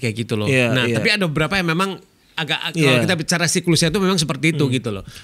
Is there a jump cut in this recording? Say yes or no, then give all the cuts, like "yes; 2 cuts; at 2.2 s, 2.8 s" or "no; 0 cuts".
no; 0 cuts